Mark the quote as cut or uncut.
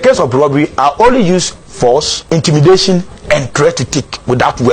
cut